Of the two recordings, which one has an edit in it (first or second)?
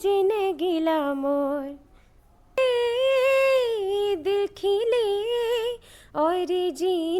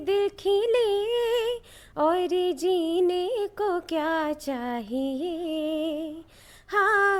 first